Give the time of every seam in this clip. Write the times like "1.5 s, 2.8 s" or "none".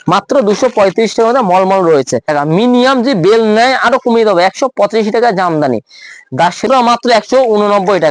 2.3 s, 6.6 s